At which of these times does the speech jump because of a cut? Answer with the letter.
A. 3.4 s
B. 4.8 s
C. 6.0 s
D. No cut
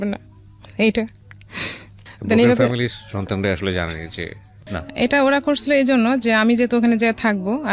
B